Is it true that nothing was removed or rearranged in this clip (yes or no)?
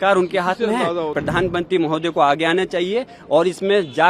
no